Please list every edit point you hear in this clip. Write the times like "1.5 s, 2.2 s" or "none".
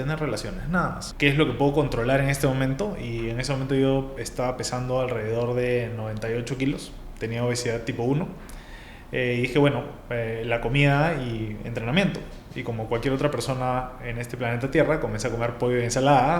1.0 s